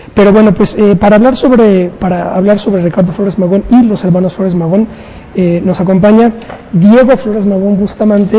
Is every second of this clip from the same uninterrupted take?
no; 1 cut; at 5.0 s

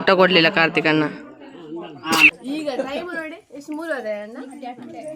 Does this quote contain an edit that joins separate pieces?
yes; 1 cut; at 2.4 s

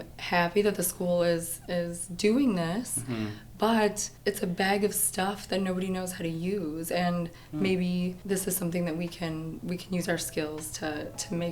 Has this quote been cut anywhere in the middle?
yes; 3 cuts; at 4.1 s, 8.2 s, 9.6 s

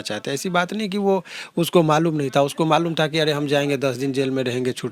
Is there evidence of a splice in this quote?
no; 0 cuts

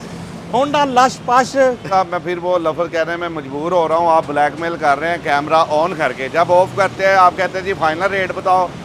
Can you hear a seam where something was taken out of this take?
yes; 1 cut; at 1.8 s

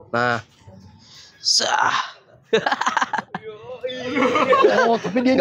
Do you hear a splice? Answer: no; 0 cuts

